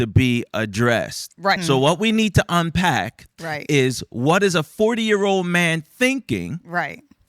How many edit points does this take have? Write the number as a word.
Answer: one